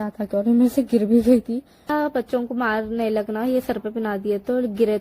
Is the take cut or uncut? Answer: cut